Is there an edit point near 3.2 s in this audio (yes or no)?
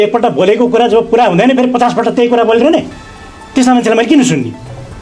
no